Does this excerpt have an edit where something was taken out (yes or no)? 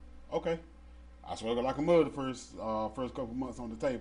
no